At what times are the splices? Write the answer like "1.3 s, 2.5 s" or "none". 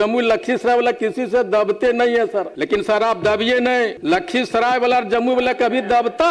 2.5 s, 4.0 s